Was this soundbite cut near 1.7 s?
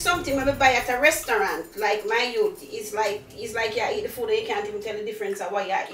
no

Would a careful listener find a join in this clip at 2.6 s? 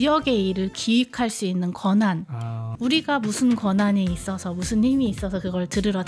yes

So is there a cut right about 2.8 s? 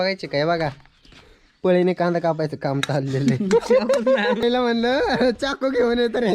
no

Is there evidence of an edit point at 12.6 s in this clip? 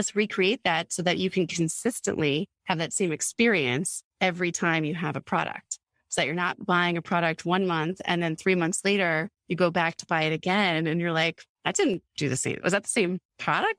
yes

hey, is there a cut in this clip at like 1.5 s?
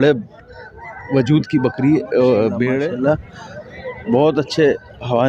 no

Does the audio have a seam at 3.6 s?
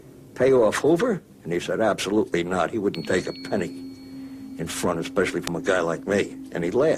yes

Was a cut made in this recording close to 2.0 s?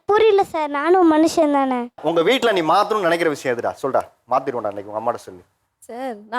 yes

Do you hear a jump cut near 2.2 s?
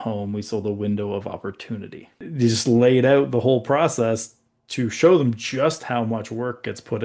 yes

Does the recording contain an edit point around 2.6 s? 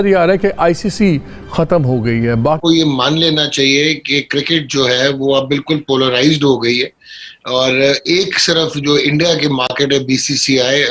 yes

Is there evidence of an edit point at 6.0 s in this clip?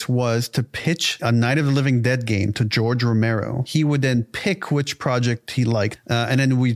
yes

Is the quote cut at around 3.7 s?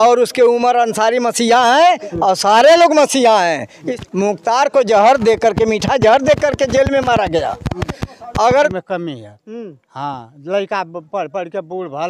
yes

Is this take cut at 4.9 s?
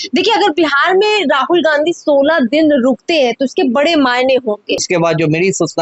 yes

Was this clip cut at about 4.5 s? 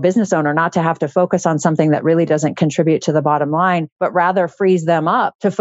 no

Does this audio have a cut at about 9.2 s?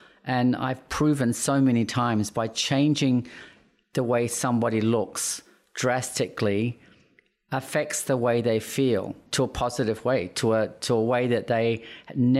yes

